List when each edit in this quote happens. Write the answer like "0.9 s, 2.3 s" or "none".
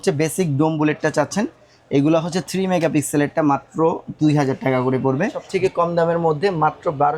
5.4 s